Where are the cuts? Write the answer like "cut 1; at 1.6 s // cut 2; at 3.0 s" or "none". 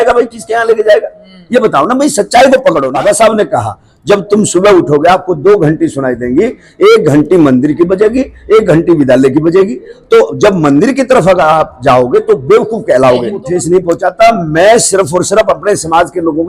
cut 1; at 2.9 s // cut 2; at 13.4 s